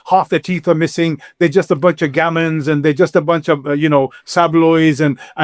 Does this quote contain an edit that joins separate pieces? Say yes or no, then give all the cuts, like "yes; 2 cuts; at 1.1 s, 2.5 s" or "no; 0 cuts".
no; 0 cuts